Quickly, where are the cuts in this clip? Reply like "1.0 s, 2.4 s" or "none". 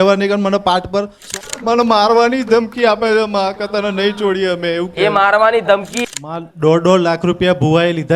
1.3 s, 6.0 s